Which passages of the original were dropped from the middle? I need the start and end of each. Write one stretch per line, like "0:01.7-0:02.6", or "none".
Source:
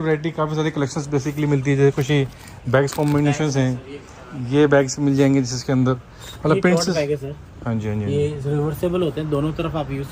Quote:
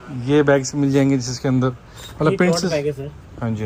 none